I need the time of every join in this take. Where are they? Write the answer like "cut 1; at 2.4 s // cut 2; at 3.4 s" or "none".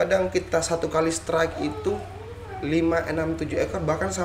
none